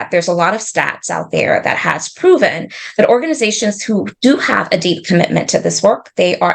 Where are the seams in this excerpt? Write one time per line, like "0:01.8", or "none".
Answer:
none